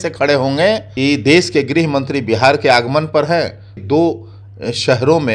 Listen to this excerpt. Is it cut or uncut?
cut